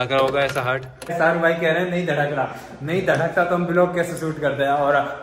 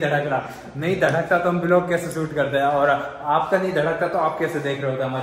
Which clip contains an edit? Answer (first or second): first